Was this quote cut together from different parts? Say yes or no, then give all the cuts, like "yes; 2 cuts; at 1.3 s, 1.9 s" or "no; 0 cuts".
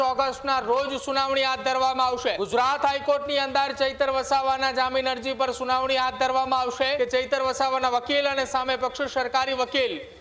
yes; 2 cuts; at 2.4 s, 7.0 s